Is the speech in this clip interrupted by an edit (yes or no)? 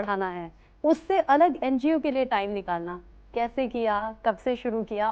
no